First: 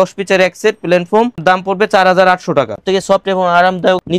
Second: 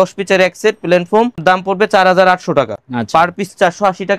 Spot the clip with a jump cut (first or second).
first